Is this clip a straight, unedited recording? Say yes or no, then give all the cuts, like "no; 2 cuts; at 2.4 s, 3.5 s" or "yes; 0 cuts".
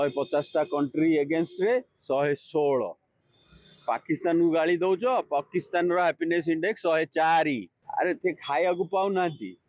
yes; 0 cuts